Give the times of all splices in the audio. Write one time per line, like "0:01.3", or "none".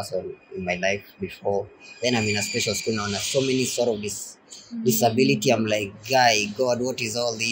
none